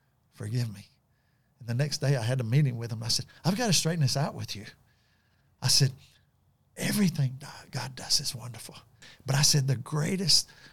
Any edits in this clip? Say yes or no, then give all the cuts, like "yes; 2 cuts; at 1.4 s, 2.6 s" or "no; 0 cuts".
yes; 1 cut; at 9.0 s